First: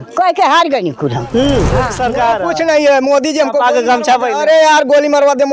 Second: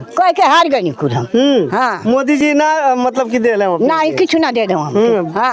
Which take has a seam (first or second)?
first